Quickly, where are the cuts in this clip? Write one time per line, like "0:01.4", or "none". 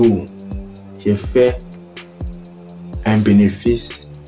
none